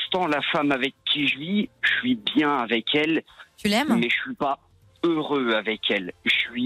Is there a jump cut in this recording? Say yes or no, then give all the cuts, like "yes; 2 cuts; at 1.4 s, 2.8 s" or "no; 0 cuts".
no; 0 cuts